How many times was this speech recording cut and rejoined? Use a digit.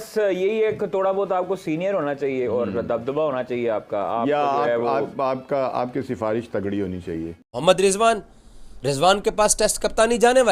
1